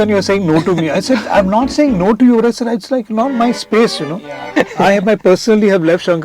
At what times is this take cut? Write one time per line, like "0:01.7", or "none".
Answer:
0:04.4